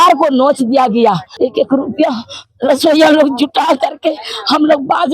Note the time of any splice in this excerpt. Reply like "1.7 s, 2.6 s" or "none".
1.3 s